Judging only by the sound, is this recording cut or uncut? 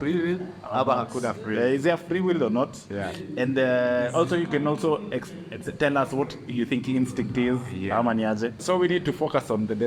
cut